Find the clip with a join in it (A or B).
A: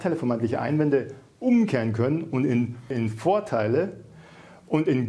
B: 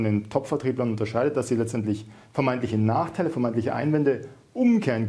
A